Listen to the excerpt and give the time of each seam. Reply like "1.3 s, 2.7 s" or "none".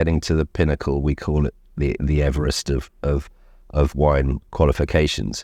none